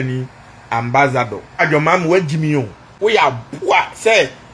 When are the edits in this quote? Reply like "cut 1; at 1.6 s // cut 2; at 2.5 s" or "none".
cut 1; at 1.6 s // cut 2; at 2.9 s